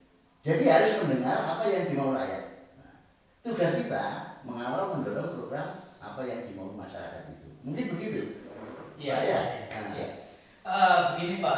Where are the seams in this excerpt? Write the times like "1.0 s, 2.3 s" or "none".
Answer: none